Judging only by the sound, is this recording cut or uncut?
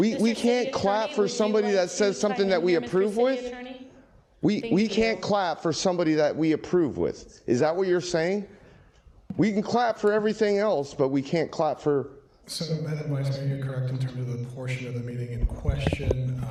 uncut